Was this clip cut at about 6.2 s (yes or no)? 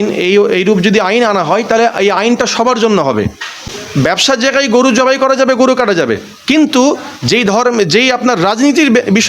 no